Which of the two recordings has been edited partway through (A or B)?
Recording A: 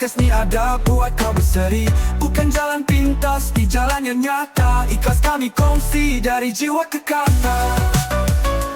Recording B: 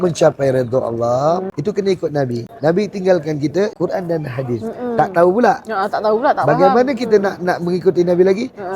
B